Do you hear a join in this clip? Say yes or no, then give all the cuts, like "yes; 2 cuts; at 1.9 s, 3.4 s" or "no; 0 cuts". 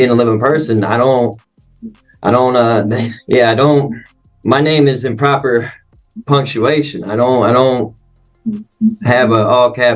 no; 0 cuts